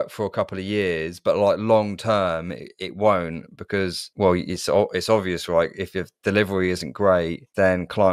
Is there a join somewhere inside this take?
no; 0 cuts

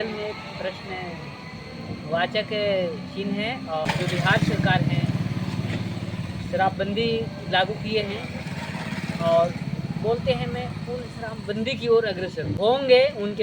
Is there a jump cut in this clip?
yes; 2 cuts; at 3.9 s, 12.5 s

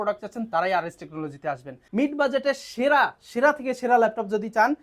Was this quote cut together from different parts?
yes; 1 cut; at 1.8 s

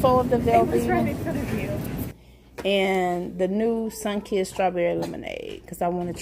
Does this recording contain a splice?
yes; 1 cut; at 2.1 s

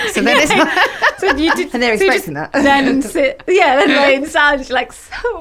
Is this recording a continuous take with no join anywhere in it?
yes; 0 cuts

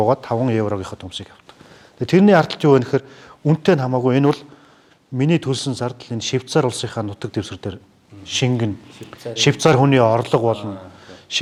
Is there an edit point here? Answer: no; 0 cuts

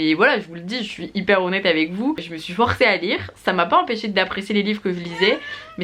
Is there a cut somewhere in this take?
no; 0 cuts

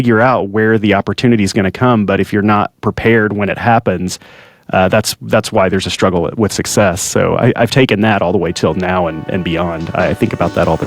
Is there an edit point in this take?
no; 0 cuts

